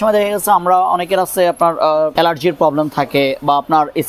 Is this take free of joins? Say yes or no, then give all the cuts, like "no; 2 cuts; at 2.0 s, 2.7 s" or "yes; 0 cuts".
no; 1 cut; at 2.1 s